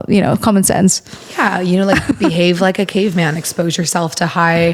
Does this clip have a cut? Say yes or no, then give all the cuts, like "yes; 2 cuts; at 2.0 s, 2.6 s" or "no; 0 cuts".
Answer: no; 0 cuts